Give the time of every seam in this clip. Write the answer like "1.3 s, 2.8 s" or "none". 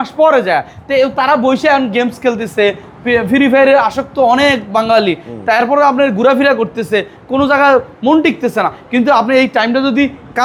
none